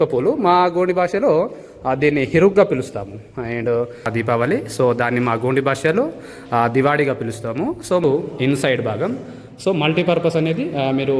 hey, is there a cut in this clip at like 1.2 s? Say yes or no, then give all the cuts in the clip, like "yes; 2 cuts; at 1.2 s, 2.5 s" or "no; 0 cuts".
no; 2 cuts; at 4.1 s, 8.0 s